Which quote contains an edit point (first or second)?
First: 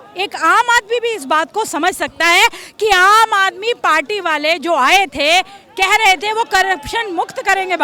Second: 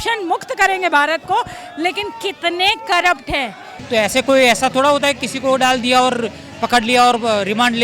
second